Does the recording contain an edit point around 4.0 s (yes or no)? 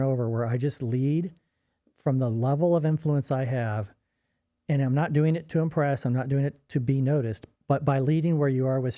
no